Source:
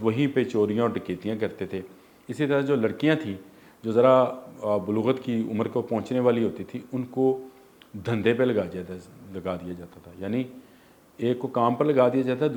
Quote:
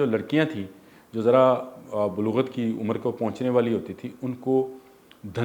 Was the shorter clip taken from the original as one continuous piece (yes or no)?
yes